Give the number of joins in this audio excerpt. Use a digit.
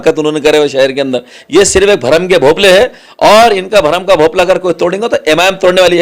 1